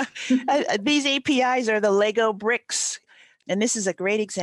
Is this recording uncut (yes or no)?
no